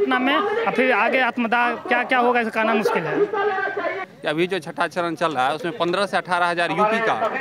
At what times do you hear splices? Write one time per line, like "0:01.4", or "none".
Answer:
0:04.0